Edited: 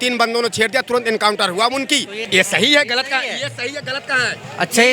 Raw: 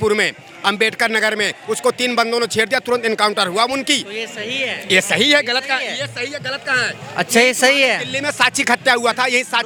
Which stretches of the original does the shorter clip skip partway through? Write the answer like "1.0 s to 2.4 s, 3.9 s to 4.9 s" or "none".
4.2 s to 4.8 s